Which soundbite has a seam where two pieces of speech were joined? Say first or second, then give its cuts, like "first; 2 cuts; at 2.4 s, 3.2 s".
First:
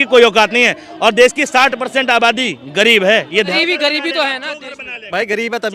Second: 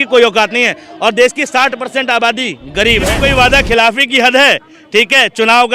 second; 1 cut; at 3.1 s